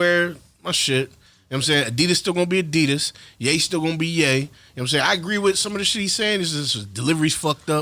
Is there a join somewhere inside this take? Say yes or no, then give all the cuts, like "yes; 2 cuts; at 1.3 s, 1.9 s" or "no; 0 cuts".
no; 0 cuts